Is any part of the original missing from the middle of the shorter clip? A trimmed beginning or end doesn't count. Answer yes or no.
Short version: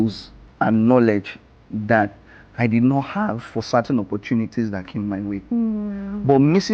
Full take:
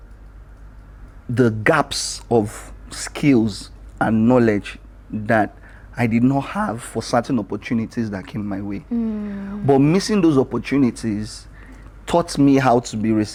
no